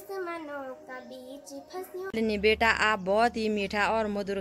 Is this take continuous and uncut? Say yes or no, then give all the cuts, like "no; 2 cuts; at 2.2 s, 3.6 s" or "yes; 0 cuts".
no; 1 cut; at 2.1 s